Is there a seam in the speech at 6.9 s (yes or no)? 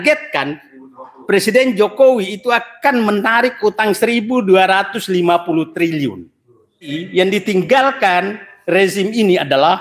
yes